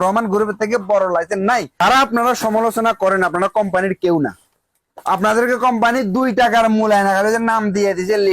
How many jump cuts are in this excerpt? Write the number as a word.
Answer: one